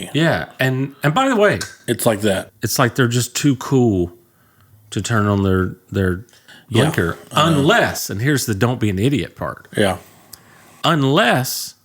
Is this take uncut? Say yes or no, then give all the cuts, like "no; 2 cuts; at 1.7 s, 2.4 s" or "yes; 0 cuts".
no; 1 cut; at 2.5 s